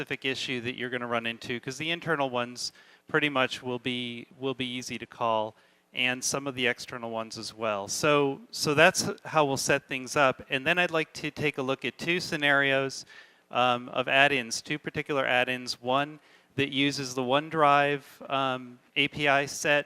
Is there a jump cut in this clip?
yes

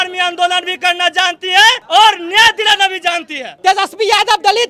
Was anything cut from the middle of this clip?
yes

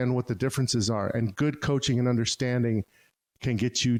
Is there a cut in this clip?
no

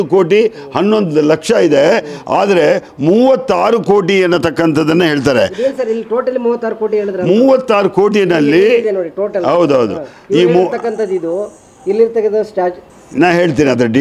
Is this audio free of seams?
yes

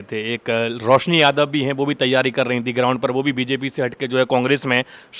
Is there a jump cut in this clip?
no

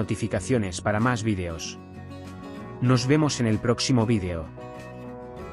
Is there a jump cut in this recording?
no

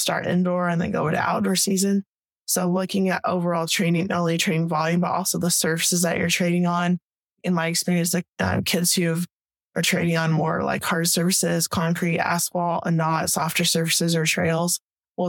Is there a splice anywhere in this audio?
no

